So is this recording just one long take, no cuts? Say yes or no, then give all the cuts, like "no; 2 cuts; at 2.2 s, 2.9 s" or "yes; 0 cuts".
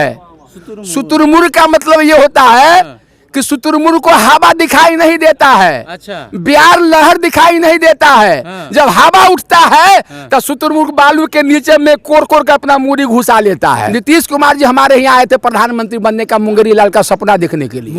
no; 1 cut; at 13.9 s